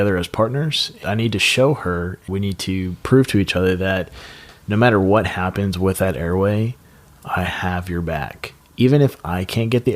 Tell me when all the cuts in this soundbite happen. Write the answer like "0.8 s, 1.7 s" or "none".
1.0 s, 2.2 s